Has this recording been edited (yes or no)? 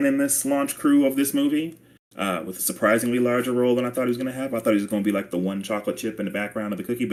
no